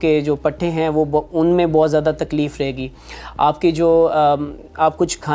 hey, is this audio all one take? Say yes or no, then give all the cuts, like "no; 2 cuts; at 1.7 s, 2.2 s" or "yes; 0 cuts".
yes; 0 cuts